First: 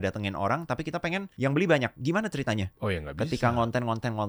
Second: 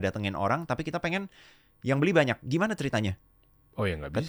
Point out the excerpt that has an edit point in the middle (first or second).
first